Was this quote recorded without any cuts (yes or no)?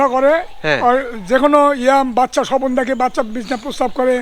yes